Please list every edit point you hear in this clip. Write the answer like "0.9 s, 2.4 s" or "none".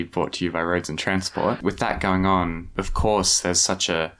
1.6 s, 2.7 s